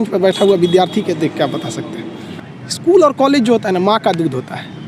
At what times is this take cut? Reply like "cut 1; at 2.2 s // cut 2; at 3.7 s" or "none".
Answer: cut 1; at 2.2 s